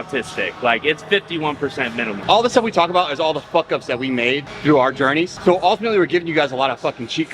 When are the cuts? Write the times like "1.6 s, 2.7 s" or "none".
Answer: 2.2 s, 5.3 s